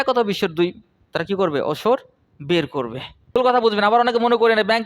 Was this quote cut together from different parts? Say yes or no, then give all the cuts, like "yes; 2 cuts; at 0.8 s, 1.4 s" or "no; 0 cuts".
yes; 1 cut; at 3.2 s